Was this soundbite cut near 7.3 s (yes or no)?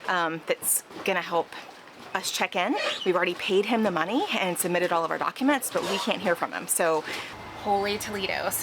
yes